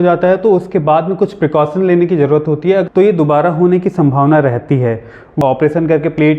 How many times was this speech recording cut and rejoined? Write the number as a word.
two